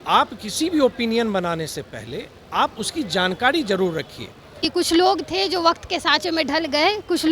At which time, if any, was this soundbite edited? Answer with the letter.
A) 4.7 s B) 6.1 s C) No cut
A